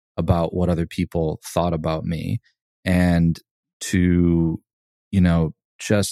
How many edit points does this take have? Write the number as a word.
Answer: zero